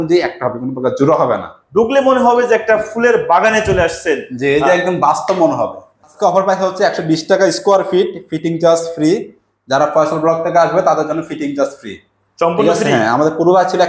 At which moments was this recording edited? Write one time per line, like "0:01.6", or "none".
0:01.6
0:06.1